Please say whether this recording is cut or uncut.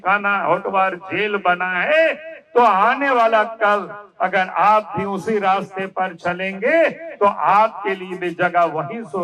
uncut